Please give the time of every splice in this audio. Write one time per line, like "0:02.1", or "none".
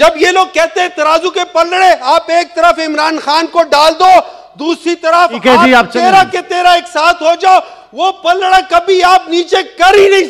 none